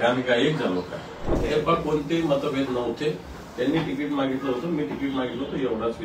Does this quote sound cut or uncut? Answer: cut